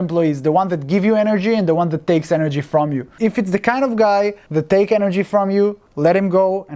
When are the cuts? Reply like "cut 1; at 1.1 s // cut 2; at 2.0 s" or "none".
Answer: cut 1; at 3.1 s // cut 2; at 4.4 s // cut 3; at 5.9 s

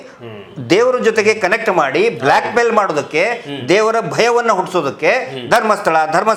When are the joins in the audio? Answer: none

